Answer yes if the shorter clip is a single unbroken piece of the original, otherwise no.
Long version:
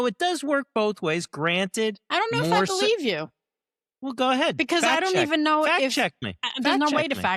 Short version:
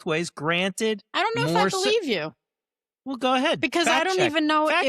yes